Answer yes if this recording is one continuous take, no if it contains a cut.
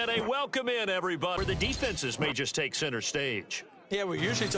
no